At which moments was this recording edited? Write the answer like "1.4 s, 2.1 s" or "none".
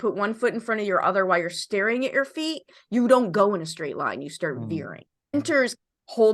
5.3 s